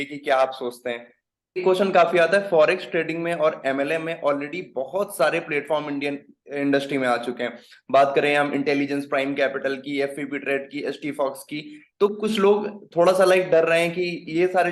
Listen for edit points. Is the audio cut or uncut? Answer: cut